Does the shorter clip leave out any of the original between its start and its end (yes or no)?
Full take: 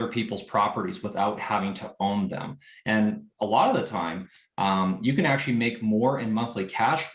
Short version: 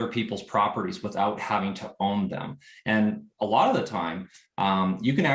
no